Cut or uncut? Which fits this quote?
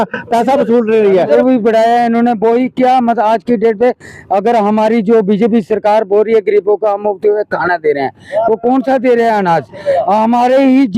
cut